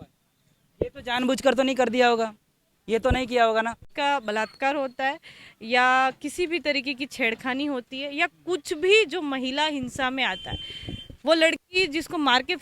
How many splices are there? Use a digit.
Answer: 1